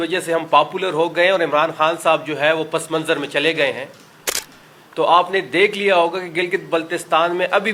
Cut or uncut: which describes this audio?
uncut